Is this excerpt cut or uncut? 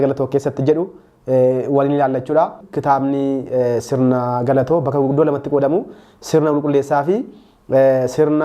cut